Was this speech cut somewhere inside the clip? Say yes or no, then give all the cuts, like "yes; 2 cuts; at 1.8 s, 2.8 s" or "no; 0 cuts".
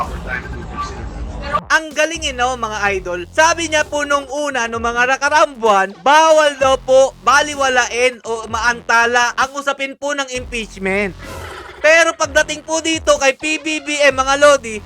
yes; 1 cut; at 1.6 s